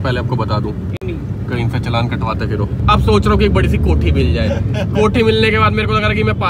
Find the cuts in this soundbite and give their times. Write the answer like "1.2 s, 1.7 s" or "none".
2.8 s